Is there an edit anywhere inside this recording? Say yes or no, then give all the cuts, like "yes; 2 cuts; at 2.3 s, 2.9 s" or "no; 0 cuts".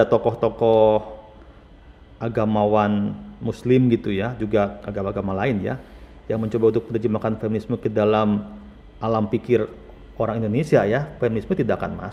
no; 0 cuts